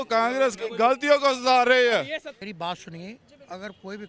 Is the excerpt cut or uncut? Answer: cut